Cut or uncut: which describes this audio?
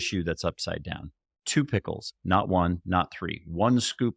uncut